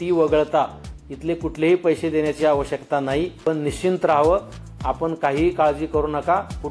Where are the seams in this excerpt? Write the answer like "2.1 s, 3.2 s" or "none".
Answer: 3.4 s